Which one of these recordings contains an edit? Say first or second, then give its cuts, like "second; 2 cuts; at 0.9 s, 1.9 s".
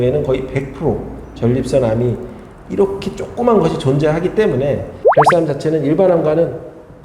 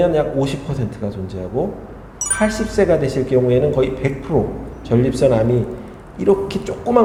first; 1 cut; at 5.0 s